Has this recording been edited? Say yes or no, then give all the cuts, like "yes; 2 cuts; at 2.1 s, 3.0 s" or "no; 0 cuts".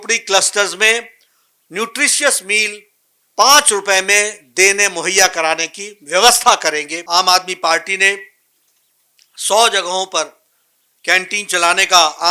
yes; 1 cut; at 6.9 s